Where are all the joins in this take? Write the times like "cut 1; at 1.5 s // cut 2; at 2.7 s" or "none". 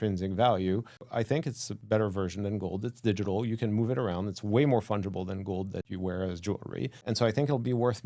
cut 1; at 1.3 s // cut 2; at 5.9 s // cut 3; at 7.0 s

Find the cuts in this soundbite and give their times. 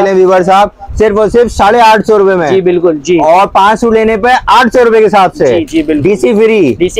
none

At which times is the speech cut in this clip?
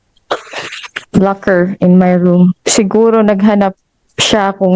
cut 1; at 2.6 s

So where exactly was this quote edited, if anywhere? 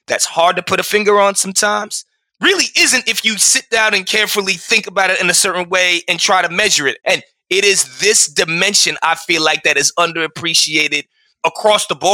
none

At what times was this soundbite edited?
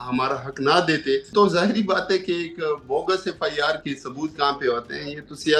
cut 1; at 1.3 s

